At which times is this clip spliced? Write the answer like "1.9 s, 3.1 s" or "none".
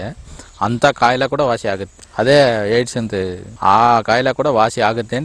1.9 s, 3.5 s